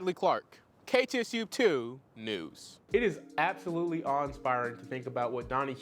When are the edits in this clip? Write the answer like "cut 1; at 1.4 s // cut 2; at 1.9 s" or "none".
cut 1; at 2.8 s